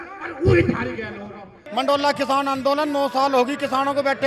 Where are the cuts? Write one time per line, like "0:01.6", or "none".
0:01.6